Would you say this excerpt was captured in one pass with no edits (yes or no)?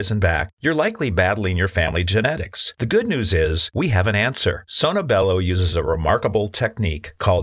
yes